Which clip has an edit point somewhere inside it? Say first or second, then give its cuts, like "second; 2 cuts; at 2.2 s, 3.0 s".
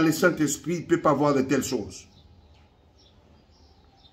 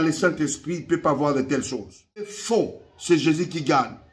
second; 1 cut; at 2.4 s